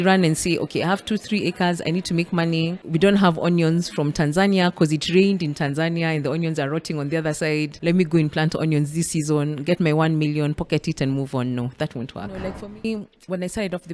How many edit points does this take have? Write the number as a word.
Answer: three